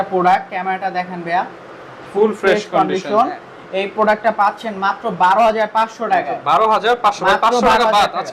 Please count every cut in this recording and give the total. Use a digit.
0